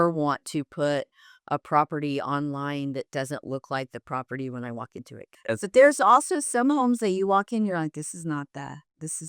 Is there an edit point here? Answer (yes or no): no